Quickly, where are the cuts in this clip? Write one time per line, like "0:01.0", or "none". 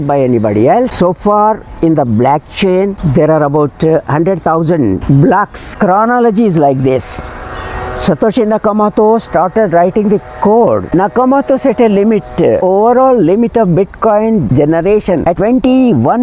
0:00.9
0:05.6
0:10.8